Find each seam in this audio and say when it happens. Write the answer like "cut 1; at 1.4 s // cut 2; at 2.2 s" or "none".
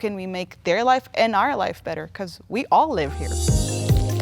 cut 1; at 3.3 s